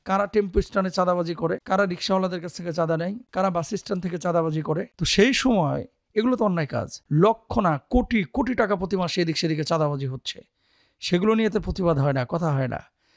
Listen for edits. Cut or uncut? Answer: uncut